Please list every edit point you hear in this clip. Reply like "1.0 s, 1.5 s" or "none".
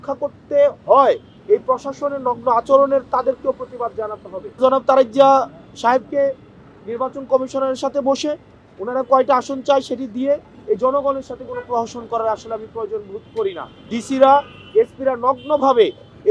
1.3 s, 4.6 s, 13.7 s